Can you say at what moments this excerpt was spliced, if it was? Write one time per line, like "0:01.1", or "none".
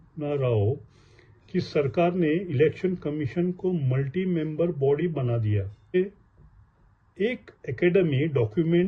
0:05.9